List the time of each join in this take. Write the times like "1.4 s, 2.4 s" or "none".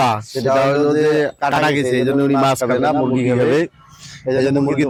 none